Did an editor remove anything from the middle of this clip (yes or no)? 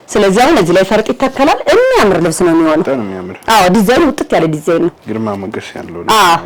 no